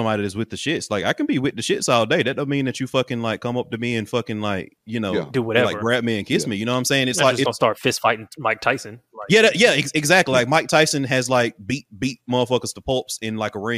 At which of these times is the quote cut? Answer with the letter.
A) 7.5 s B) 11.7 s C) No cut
A